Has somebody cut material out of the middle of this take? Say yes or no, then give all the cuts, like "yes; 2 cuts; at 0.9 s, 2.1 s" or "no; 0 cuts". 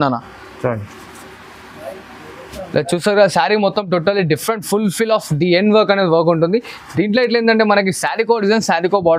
no; 0 cuts